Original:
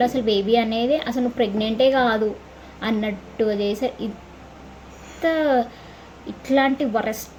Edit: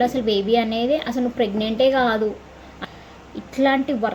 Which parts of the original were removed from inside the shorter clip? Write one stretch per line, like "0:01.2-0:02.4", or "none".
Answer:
0:02.8-0:05.7